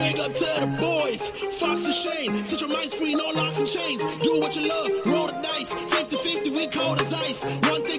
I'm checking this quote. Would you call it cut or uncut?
uncut